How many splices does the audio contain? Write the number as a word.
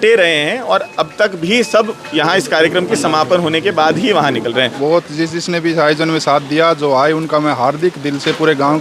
one